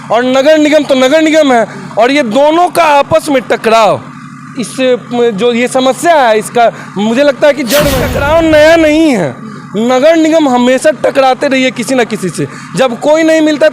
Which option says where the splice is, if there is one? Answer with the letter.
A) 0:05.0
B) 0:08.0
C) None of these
B